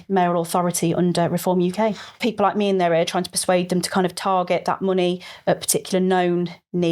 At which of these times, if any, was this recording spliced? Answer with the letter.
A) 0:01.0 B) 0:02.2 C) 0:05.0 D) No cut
B